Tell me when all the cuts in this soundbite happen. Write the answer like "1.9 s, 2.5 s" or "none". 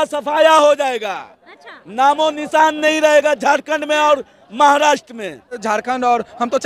5.6 s